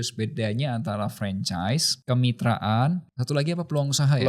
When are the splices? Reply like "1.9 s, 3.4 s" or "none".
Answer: 1.9 s, 3.1 s